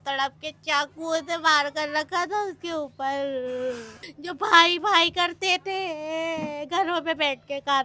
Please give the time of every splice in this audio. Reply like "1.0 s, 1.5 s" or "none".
4.1 s